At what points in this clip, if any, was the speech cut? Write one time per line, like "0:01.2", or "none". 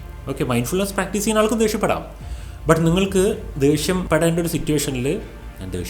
0:04.0